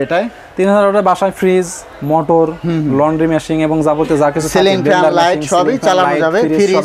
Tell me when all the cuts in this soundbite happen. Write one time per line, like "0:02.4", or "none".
none